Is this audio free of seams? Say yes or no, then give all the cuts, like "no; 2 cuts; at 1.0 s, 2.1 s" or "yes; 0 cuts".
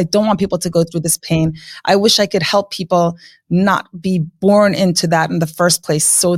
yes; 0 cuts